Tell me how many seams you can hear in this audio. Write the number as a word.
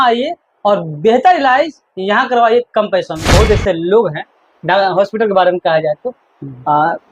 one